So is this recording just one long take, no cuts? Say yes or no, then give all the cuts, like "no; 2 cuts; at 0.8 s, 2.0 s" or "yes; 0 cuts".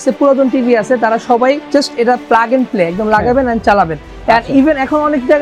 yes; 0 cuts